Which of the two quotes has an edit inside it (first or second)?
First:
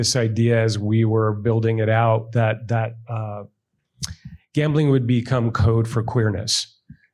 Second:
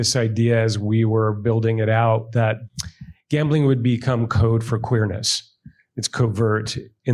second